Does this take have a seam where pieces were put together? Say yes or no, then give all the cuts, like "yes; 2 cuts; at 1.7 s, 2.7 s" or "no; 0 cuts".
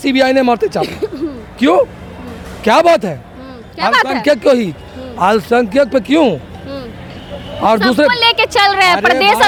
no; 0 cuts